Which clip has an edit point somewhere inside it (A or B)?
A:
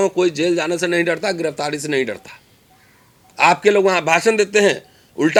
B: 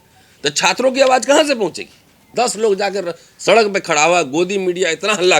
B